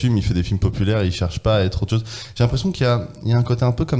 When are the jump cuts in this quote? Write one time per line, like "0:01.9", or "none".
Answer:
none